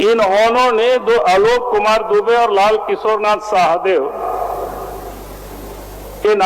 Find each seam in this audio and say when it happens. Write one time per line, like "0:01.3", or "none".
none